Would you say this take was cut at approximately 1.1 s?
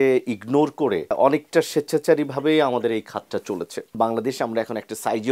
yes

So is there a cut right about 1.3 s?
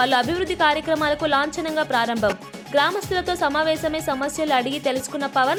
no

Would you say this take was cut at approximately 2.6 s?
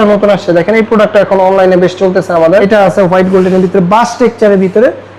yes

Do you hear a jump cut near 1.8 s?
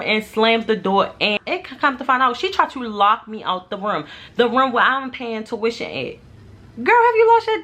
no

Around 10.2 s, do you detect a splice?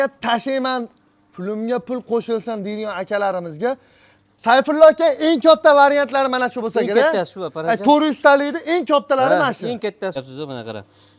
yes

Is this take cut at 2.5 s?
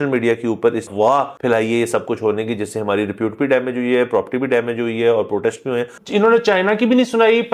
no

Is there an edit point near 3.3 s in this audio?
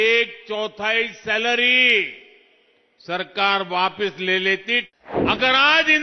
no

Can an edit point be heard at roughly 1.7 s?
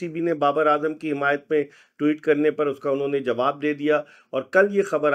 no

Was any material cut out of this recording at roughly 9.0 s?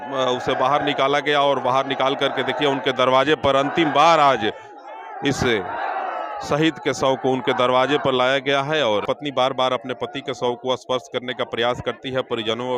yes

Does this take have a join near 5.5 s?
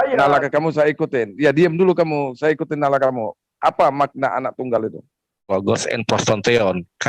yes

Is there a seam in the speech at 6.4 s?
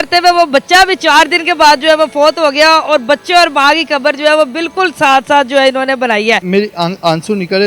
yes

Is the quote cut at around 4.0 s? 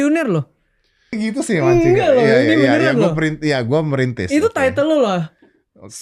no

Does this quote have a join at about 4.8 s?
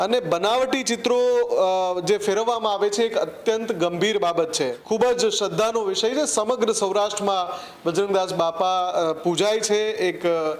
yes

